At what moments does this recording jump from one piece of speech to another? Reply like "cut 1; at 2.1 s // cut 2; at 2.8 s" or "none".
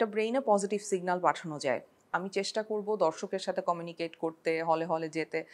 cut 1; at 2.0 s